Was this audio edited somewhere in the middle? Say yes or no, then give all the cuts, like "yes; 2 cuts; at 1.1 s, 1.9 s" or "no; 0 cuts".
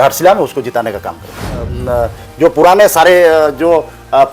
yes; 1 cut; at 1.6 s